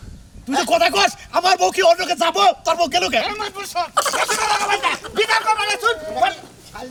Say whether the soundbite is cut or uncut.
uncut